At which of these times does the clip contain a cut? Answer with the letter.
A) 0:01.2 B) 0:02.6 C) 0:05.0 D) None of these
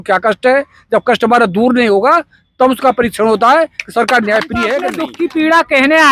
C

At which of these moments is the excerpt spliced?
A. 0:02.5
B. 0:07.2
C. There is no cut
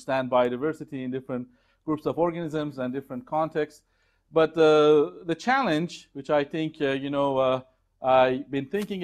A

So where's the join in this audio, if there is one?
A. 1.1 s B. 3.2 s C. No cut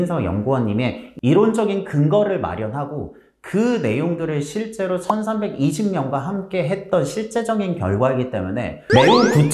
C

